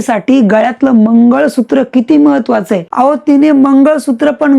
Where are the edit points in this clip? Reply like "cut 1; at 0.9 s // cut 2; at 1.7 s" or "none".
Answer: cut 1; at 2.8 s

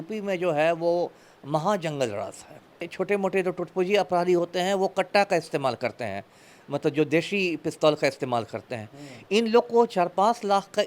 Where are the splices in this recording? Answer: cut 1; at 2.9 s

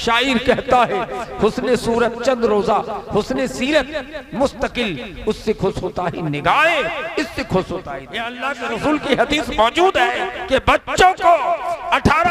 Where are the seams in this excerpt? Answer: cut 1; at 8.4 s // cut 2; at 10.3 s

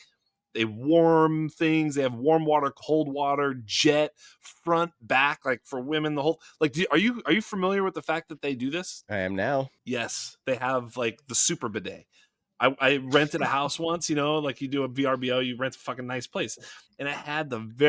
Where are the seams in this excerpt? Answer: cut 1; at 9.0 s // cut 2; at 9.8 s // cut 3; at 16.8 s

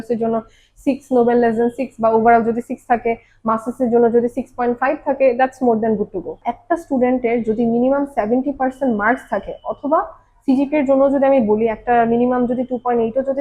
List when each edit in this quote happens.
cut 1; at 6.3 s

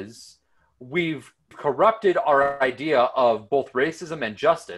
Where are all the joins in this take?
cut 1; at 1.6 s

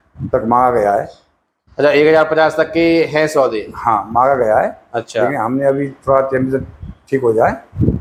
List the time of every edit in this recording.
none

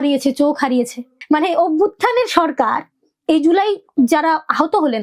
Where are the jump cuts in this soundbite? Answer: cut 1; at 1.1 s

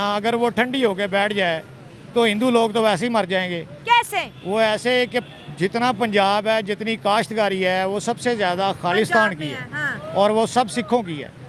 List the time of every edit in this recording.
none

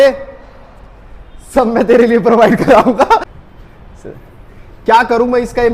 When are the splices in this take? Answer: cut 1; at 3.3 s

